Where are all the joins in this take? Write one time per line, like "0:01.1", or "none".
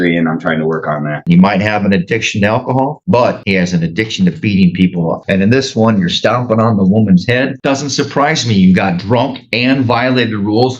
0:01.2
0:05.2
0:07.6

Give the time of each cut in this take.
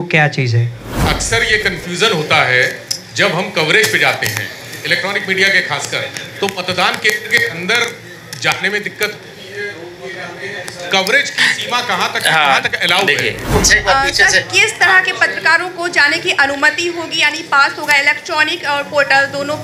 0:01.0
0:13.4

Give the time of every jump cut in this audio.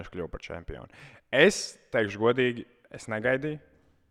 none

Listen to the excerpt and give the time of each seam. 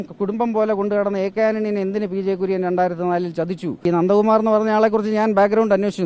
0:03.8

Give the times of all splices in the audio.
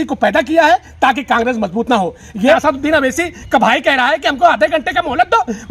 0:02.6

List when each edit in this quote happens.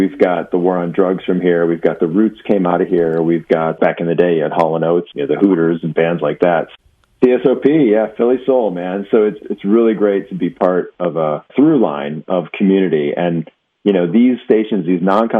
0:03.8
0:05.1
0:06.7
0:09.4
0:11.5

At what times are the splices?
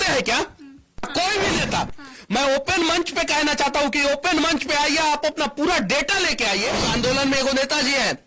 0:01.1
0:06.8

